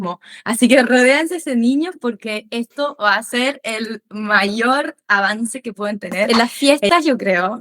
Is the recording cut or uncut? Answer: cut